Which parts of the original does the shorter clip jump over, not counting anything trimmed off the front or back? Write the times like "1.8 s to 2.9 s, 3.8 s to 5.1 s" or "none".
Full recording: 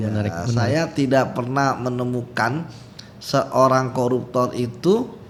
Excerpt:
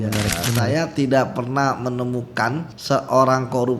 2.7 s to 3.2 s